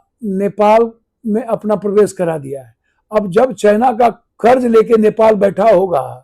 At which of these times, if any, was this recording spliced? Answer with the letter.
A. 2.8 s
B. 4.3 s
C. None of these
B